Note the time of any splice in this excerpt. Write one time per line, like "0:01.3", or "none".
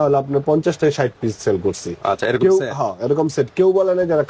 none